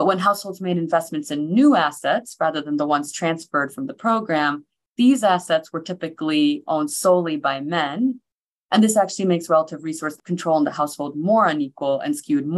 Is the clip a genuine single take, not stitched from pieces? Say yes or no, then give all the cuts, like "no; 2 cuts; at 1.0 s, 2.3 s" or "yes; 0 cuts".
no; 2 cuts; at 8.3 s, 10.2 s